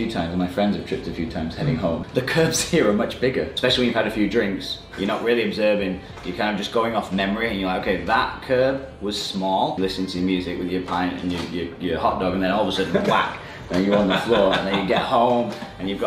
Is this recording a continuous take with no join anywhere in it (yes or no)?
no